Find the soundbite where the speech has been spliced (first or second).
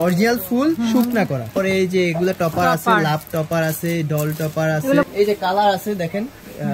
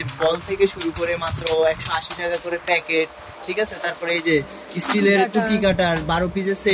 first